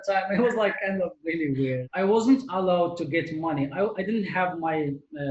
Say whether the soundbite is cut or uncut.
cut